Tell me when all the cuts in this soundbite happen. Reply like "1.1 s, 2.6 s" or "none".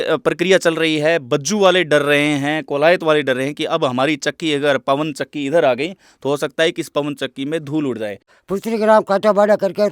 8.2 s